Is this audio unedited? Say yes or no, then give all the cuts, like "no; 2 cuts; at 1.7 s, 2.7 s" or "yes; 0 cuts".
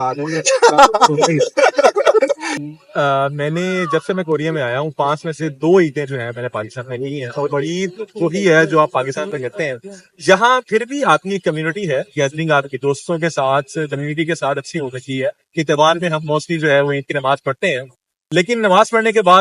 yes; 0 cuts